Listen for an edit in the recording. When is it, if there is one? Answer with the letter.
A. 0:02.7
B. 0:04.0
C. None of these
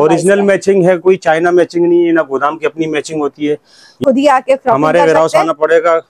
B